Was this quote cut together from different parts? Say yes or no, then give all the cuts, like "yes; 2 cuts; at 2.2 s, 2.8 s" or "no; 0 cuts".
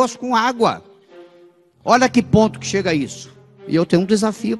yes; 1 cut; at 3.6 s